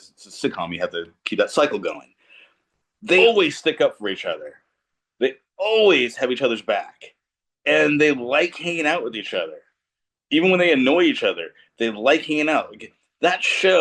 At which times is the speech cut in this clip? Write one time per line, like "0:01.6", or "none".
0:03.2